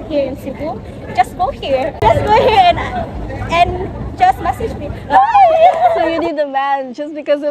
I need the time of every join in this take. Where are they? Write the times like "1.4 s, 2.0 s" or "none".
2.0 s, 6.0 s